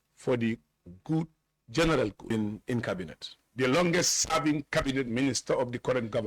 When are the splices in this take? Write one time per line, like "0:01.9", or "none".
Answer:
0:02.2